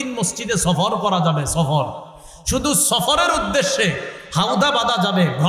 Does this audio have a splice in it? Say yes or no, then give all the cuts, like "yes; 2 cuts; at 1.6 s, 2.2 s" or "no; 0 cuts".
no; 0 cuts